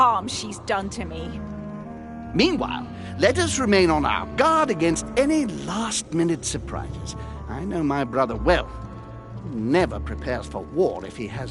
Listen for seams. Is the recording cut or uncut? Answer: uncut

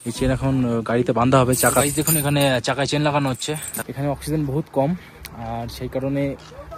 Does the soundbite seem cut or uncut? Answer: cut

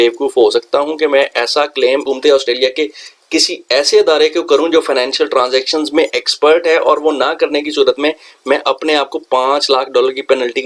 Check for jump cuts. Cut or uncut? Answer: uncut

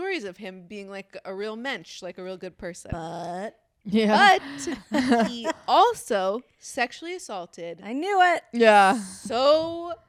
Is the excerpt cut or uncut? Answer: uncut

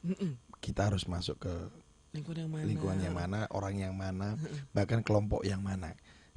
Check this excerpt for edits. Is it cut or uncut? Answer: uncut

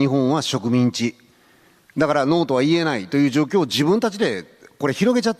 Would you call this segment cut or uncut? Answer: uncut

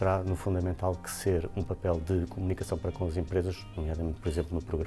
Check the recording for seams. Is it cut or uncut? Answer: uncut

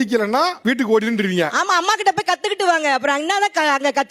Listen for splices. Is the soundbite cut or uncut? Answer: uncut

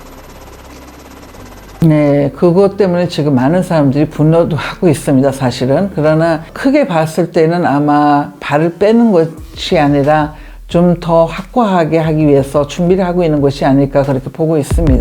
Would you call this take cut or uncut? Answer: uncut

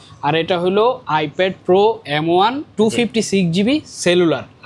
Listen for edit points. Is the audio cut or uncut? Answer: uncut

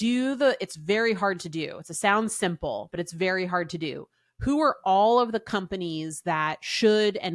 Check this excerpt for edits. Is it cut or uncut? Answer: uncut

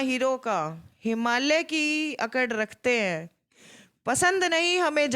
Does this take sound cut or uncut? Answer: uncut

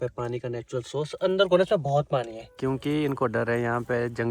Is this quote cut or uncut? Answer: cut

